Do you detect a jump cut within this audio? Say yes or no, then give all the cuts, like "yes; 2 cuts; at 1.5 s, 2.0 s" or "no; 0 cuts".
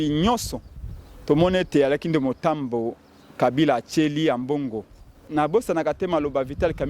yes; 1 cut; at 5.2 s